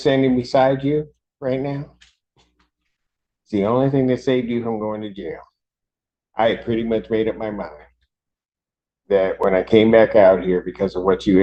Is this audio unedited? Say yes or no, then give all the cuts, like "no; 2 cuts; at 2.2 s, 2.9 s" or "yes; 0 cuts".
yes; 0 cuts